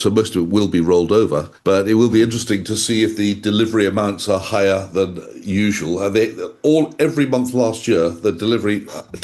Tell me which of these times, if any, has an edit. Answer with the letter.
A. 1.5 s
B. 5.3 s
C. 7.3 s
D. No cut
A